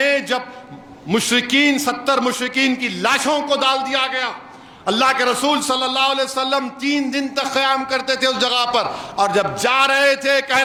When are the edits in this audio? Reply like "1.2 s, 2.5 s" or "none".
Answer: none